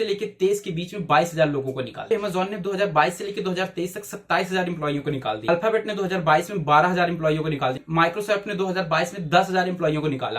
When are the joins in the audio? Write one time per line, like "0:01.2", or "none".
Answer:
0:02.1
0:05.4
0:07.8